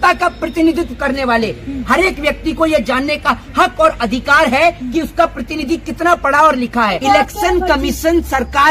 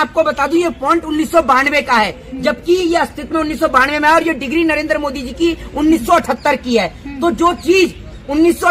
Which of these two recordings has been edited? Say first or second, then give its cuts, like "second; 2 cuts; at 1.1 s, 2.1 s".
first; 1 cut; at 7.0 s